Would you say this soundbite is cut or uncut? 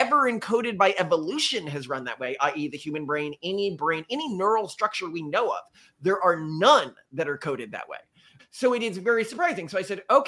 uncut